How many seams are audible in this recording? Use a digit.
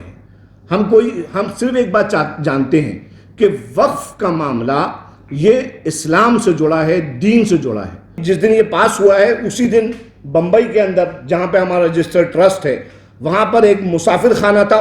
1